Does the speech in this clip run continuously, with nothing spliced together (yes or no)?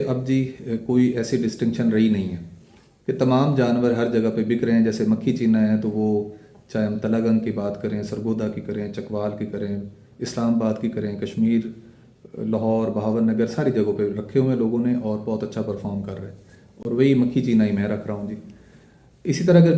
yes